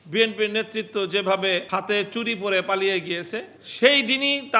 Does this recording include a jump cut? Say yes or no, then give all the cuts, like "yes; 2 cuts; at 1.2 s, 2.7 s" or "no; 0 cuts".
yes; 2 cuts; at 1.6 s, 3.6 s